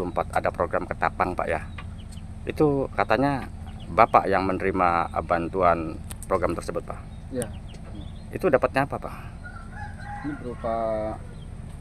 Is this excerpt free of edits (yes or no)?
yes